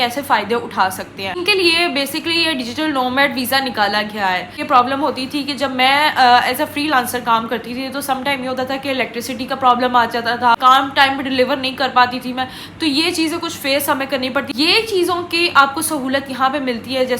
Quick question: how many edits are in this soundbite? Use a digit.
4